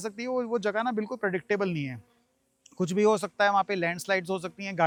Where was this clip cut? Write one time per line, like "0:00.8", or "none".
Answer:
none